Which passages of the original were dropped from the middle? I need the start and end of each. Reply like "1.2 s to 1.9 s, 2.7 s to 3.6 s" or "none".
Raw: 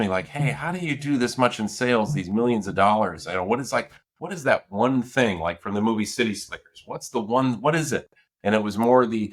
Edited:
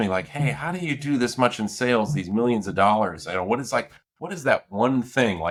none

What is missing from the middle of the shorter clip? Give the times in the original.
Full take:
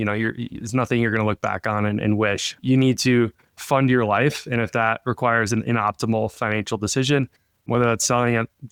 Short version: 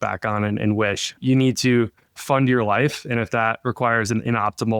none

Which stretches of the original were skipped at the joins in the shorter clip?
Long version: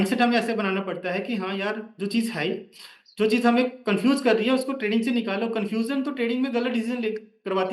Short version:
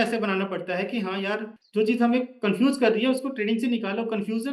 1.9 s to 3.0 s

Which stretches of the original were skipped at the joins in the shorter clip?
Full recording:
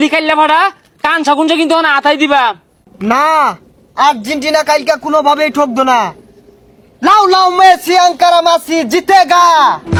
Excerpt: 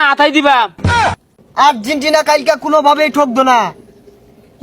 3.0 s to 3.5 s

